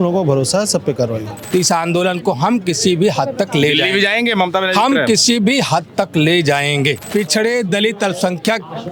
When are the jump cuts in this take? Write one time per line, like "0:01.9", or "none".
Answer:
0:01.4
0:07.0